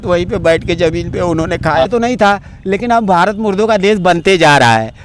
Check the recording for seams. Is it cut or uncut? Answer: cut